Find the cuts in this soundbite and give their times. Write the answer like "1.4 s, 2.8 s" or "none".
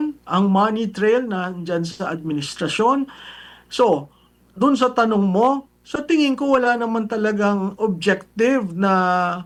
none